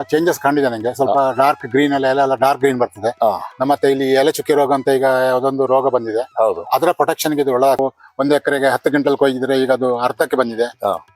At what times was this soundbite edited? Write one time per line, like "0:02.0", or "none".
0:07.8